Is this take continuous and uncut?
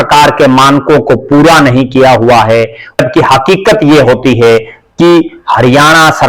no; 1 cut; at 3.0 s

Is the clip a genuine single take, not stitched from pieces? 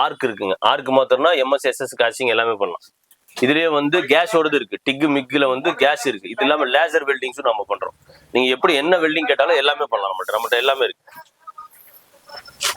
yes; 0 cuts

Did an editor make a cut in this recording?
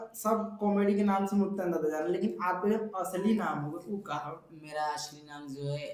no; 0 cuts

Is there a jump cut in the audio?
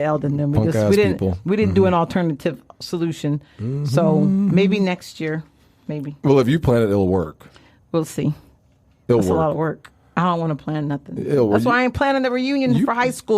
no; 0 cuts

